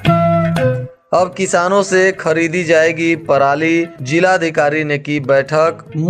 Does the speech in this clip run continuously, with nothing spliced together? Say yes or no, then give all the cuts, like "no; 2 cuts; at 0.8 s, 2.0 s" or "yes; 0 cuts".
no; 1 cut; at 0.9 s